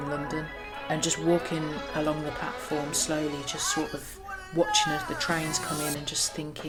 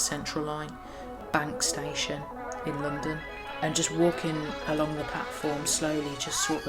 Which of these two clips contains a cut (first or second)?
second